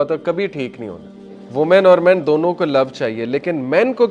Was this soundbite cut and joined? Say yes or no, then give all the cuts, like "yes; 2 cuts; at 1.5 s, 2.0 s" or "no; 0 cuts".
yes; 1 cut; at 1.4 s